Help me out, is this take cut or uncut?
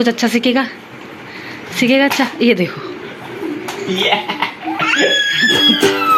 uncut